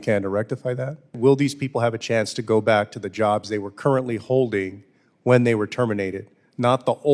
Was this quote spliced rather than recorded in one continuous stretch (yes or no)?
yes